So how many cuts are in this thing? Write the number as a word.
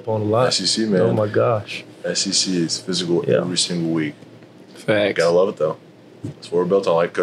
zero